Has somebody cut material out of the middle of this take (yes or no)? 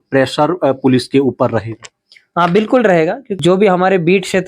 yes